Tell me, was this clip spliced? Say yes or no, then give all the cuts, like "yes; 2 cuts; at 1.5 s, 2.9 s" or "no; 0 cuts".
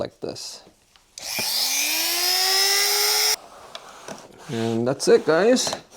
yes; 1 cut; at 3.3 s